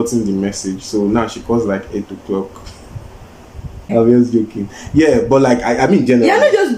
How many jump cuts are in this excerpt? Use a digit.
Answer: 1